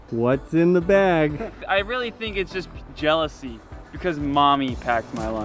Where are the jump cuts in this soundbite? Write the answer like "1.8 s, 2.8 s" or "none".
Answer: 1.6 s